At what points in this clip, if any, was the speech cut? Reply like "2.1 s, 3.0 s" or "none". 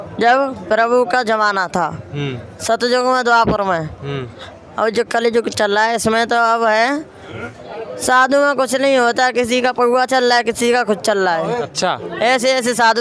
7.4 s, 11.7 s